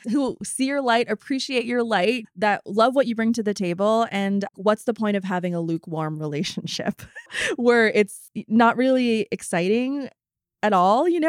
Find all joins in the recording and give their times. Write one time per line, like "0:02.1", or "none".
0:04.5
0:07.4